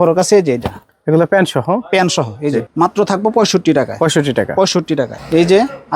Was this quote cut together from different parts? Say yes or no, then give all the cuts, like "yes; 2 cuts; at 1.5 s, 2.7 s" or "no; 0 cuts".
yes; 1 cut; at 2.6 s